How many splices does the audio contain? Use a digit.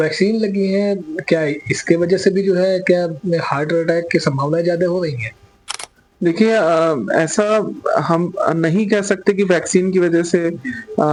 0